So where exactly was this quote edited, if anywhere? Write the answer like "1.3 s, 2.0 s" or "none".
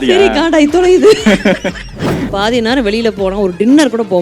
2.3 s